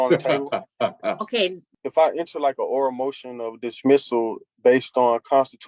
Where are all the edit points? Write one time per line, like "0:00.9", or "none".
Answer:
0:01.7